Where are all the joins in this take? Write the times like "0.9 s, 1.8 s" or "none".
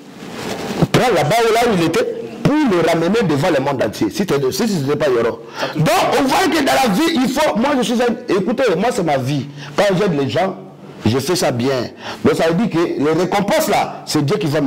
none